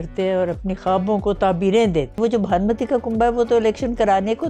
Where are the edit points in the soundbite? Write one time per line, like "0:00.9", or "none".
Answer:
0:02.2